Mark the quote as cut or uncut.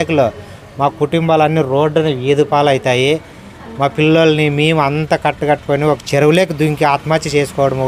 uncut